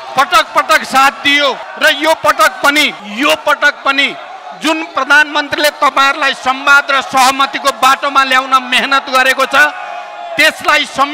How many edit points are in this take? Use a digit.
2